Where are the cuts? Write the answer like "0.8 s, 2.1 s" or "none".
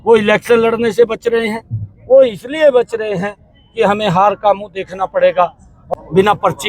5.8 s